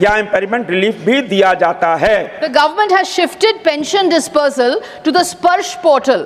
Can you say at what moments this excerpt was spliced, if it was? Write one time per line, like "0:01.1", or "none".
0:02.4